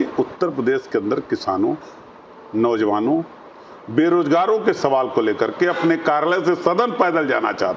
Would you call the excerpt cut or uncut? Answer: uncut